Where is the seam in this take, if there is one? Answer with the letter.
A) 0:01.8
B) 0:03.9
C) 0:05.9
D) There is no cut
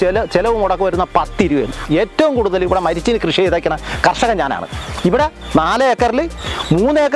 A